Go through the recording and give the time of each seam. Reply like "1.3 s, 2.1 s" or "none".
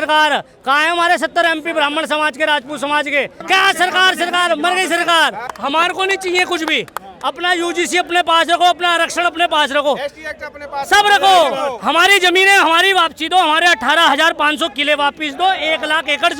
3.4 s, 5.5 s